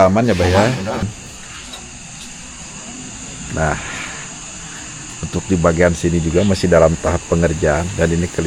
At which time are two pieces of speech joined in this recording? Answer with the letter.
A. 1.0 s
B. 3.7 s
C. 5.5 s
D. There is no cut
A